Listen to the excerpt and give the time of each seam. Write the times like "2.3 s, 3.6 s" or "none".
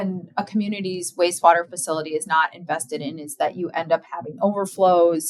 none